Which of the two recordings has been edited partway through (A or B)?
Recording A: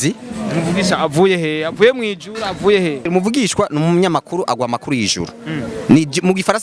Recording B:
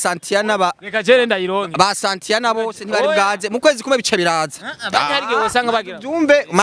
A